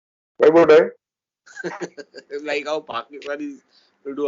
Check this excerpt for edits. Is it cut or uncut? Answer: uncut